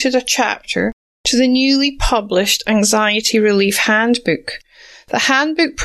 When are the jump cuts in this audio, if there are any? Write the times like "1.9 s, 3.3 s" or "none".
none